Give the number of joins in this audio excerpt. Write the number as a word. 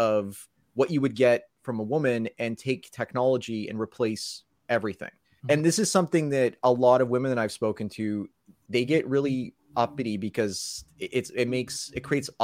zero